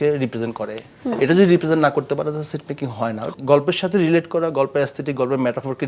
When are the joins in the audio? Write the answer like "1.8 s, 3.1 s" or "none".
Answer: 3.3 s